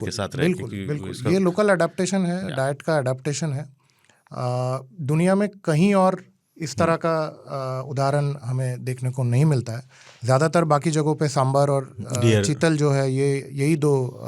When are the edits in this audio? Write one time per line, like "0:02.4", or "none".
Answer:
none